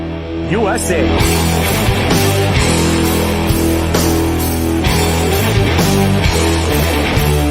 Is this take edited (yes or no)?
no